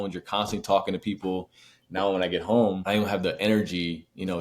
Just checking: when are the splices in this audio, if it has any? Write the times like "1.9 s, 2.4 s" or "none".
2.8 s